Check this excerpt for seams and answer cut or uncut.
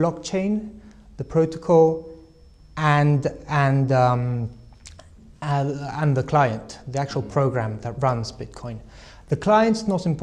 cut